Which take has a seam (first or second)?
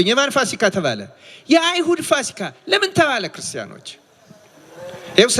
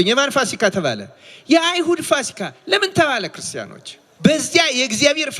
second